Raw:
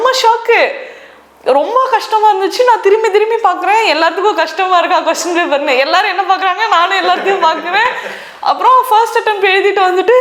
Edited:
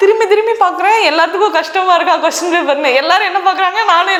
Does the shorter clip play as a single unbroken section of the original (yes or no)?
yes